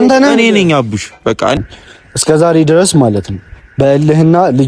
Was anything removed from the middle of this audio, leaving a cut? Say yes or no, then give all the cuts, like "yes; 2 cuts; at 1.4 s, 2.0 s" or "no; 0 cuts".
yes; 1 cut; at 1.6 s